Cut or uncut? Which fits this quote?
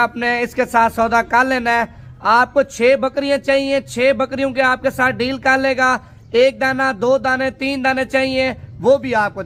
uncut